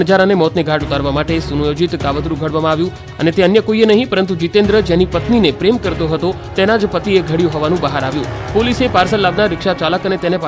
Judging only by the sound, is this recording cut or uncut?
uncut